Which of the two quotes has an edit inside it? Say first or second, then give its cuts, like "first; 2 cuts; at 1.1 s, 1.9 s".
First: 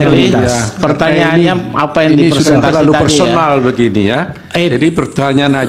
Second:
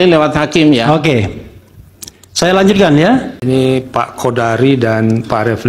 second; 1 cut; at 3.3 s